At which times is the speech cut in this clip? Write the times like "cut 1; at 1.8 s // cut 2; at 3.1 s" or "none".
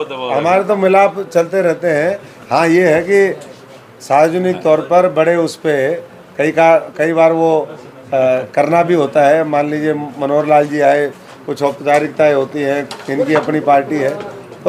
none